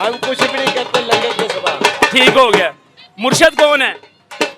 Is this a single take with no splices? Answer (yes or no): yes